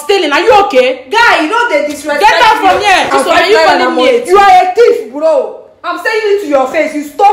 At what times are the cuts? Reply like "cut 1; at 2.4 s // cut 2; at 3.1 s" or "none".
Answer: cut 1; at 3.1 s